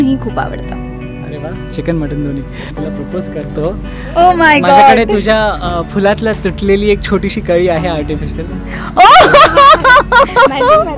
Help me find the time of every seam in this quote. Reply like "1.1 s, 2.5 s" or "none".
2.7 s